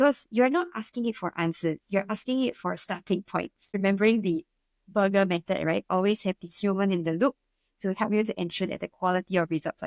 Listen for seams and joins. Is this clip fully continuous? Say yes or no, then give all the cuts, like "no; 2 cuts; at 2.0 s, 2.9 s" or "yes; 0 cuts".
no; 1 cut; at 3.7 s